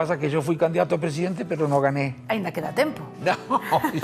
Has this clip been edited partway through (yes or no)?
yes